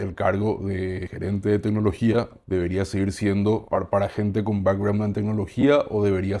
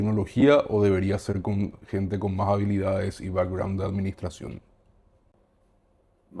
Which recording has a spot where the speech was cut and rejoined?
first; 3 cuts; at 1.1 s, 2.4 s, 3.6 s

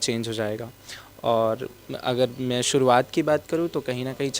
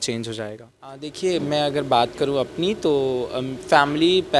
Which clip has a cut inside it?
second; 1 cut; at 1.1 s

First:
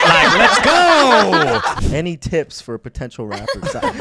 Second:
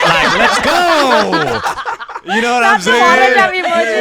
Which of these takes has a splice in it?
first; 1 cut; at 1.8 s

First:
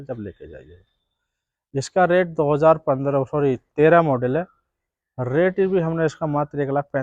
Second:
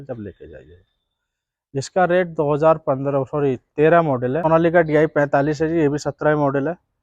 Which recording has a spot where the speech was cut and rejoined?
second; 1 cut; at 4.4 s

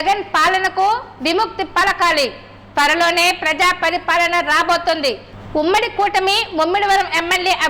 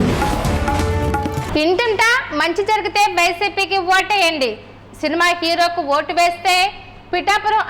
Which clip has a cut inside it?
second; 1 cut; at 1.4 s

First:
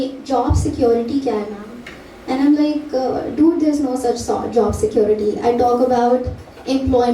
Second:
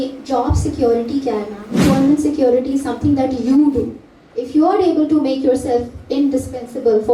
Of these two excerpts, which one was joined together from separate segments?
second; 1 cut; at 1.8 s

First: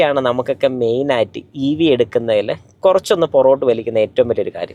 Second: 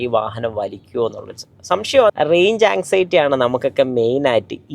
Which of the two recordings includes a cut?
second; 1 cut; at 2.1 s

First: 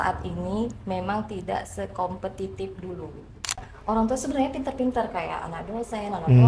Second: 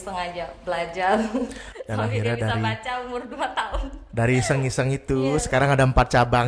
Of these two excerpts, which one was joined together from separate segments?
first; 1 cut; at 3.7 s

